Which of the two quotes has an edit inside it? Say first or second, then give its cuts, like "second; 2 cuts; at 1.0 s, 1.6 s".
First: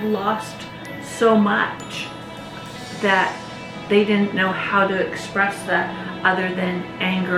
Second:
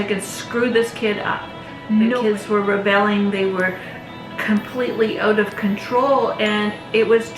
second; 1 cut; at 2.2 s